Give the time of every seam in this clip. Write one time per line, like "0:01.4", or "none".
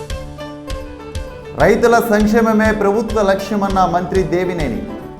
0:01.0

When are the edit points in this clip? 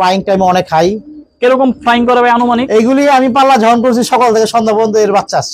none

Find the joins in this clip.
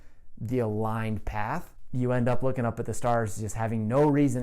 0:01.8

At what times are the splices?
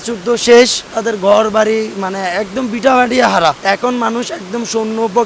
0:00.9
0:03.6

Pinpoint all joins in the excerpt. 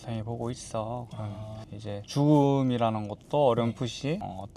none

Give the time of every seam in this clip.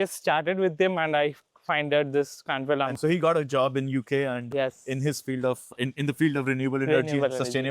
0:02.9

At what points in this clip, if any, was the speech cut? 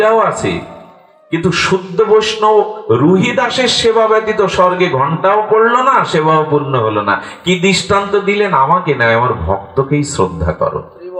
none

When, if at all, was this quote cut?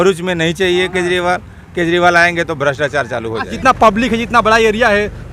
0:03.5

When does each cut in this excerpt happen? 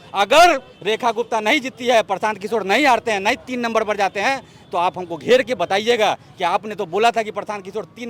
none

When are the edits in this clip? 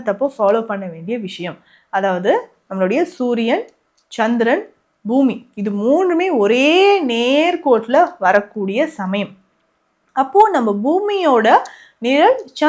none

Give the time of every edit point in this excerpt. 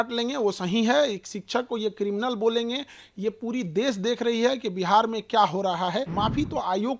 0:06.1

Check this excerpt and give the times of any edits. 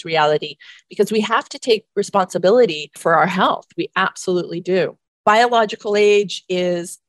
0:02.9
0:05.1

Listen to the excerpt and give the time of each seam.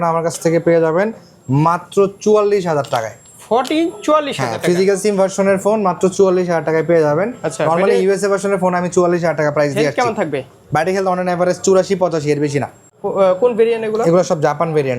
none

